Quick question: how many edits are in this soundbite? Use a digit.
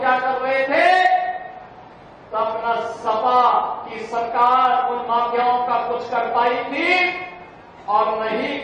0